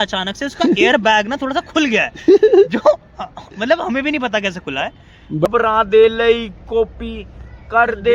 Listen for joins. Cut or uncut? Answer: cut